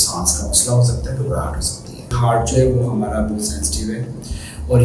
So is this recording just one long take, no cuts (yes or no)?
no